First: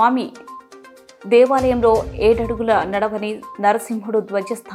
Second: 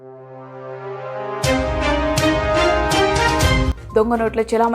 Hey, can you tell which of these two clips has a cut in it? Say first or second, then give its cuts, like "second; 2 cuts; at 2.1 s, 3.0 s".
second; 1 cut; at 3.7 s